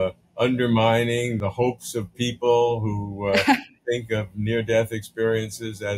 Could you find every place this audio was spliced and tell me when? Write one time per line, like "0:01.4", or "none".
0:01.4